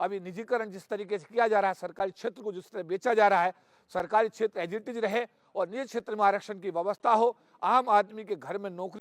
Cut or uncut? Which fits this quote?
uncut